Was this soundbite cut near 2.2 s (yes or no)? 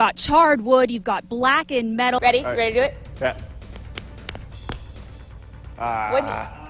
yes